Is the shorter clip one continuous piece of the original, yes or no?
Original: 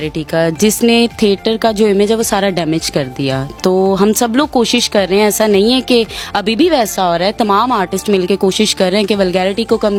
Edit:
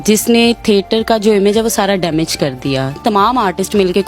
no